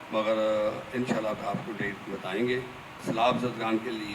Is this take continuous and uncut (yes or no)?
no